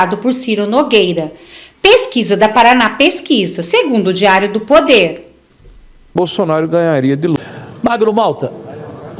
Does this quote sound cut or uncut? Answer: cut